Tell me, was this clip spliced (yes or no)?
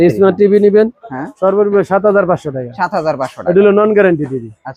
no